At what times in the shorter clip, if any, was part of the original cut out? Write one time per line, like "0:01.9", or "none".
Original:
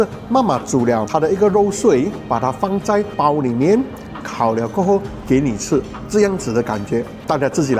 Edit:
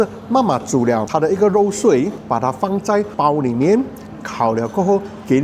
none

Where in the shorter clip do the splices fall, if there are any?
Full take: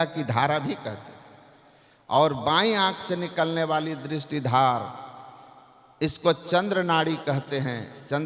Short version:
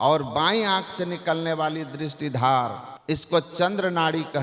0:02.9

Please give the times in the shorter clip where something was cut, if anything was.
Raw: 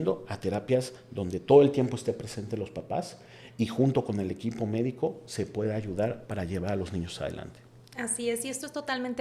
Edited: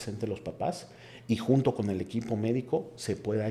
none

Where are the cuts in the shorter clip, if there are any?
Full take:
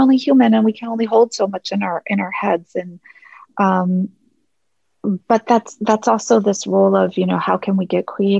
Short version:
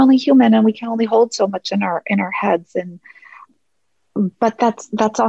0:03.4

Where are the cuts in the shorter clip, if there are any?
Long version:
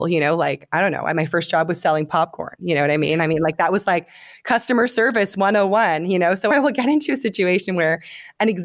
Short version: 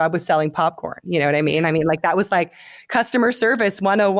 none

